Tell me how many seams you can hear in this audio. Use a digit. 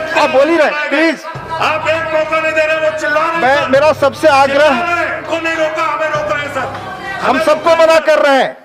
1